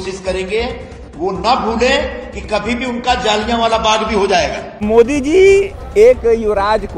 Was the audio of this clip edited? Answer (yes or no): yes